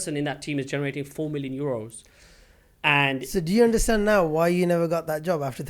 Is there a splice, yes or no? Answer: no